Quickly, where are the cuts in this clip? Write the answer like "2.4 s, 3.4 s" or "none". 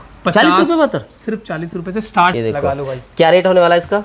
2.3 s